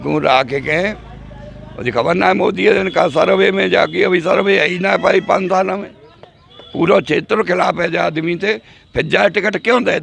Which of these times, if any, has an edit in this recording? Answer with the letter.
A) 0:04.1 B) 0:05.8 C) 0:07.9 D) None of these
D